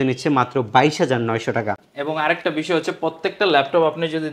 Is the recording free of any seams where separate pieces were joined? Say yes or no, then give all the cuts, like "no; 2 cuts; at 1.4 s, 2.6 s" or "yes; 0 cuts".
yes; 0 cuts